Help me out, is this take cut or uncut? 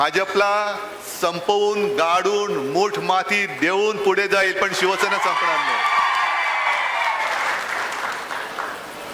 uncut